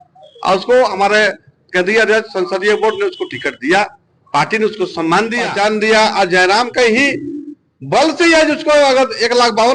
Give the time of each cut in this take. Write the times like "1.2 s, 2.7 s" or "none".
5.5 s